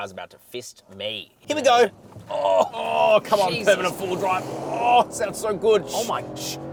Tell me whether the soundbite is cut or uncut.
uncut